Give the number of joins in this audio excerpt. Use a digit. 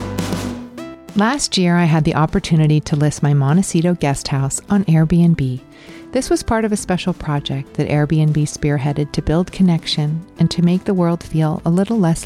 1